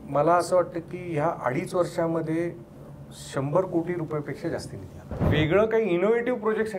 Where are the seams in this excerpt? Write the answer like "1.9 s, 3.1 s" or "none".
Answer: 5.1 s